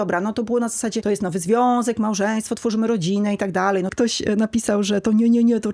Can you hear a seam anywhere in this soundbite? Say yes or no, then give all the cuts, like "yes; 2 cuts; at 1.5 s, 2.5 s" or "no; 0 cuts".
yes; 2 cuts; at 1.0 s, 3.9 s